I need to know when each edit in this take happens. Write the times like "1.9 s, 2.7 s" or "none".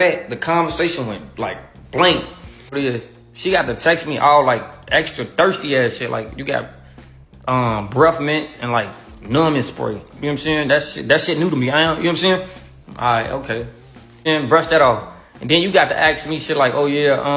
2.7 s, 14.2 s